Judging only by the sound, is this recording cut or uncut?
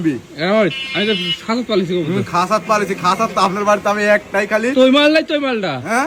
uncut